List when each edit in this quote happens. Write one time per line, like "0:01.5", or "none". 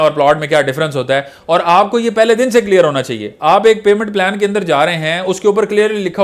none